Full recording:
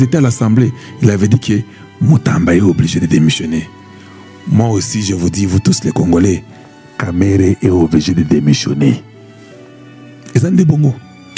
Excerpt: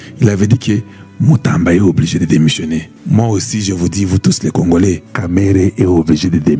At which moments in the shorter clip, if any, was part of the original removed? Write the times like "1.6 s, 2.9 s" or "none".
2.9 s, 5.1 s